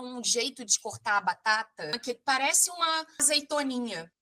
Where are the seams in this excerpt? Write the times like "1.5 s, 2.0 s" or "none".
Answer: 2.0 s, 3.2 s